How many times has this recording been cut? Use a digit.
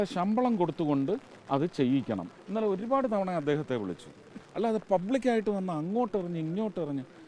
2